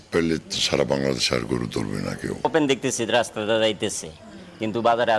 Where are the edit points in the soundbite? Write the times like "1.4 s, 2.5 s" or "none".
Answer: 2.4 s